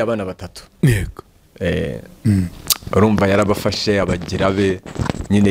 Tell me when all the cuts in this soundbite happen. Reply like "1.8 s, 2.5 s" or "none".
none